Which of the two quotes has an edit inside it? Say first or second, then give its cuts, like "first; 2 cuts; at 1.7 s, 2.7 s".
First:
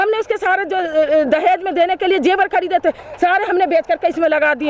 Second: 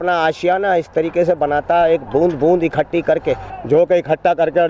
second; 1 cut; at 3.5 s